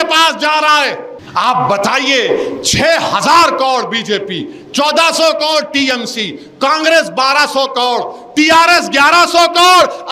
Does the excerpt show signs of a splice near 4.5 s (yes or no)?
no